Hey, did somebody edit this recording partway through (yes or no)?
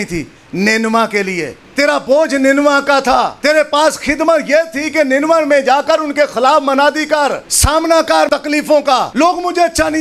yes